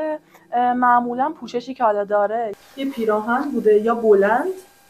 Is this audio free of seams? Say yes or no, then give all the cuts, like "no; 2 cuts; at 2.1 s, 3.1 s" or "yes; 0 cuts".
no; 1 cut; at 2.5 s